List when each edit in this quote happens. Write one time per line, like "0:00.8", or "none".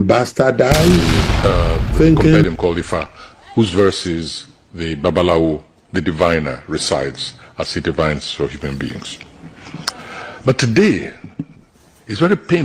0:02.4